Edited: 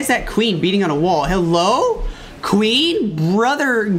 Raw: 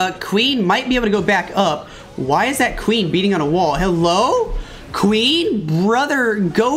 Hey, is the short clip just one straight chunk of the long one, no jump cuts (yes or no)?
yes